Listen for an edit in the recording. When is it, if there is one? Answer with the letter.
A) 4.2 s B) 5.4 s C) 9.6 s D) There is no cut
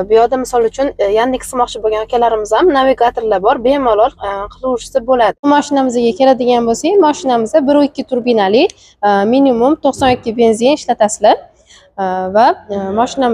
B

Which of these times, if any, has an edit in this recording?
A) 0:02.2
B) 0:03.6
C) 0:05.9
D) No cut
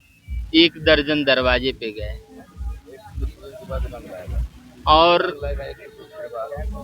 D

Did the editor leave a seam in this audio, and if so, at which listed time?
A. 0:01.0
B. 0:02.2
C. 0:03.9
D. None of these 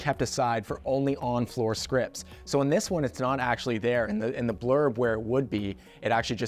D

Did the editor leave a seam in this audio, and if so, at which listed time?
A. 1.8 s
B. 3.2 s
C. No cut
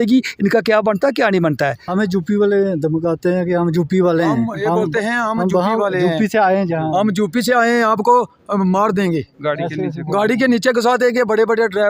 A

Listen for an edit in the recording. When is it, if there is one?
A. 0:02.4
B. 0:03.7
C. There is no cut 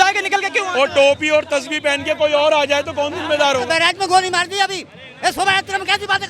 B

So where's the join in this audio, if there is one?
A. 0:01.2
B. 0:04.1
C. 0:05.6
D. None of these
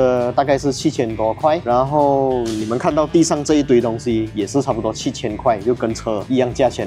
D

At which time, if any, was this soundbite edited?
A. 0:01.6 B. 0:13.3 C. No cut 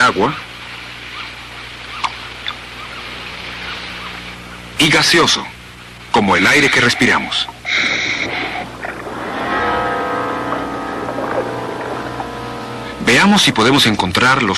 B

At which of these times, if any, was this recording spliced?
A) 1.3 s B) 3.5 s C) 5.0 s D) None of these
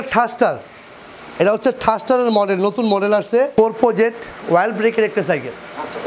B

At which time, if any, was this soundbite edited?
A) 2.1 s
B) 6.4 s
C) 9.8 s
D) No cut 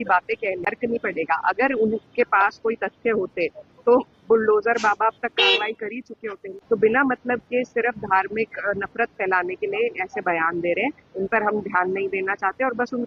D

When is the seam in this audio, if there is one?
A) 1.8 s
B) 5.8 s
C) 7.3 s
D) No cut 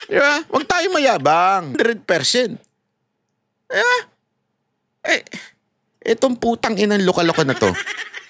A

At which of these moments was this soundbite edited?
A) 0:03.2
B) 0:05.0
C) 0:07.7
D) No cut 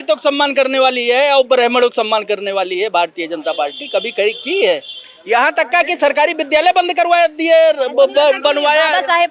D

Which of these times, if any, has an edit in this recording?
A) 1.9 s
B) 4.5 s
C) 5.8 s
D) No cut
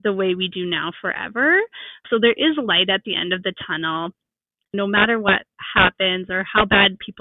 B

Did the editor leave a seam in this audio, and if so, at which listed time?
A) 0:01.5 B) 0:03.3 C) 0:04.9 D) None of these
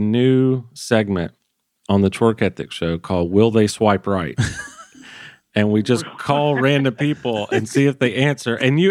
D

